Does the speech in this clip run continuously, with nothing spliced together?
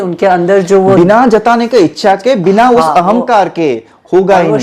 yes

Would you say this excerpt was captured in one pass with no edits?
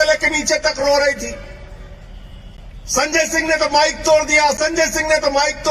yes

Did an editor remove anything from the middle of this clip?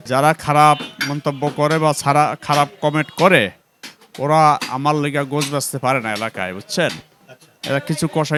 no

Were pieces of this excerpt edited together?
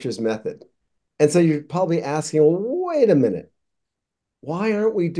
no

